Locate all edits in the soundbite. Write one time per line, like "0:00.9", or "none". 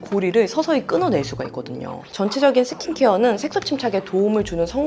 0:02.0